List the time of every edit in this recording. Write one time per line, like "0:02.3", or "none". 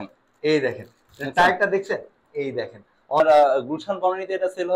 0:03.2